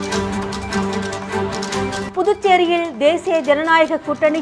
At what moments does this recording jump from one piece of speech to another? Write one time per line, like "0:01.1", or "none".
none